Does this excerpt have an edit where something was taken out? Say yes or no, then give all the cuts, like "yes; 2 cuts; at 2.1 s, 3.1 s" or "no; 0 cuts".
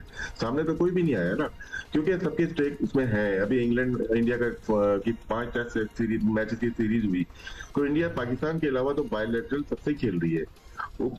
no; 0 cuts